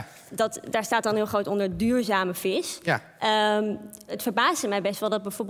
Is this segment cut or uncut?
cut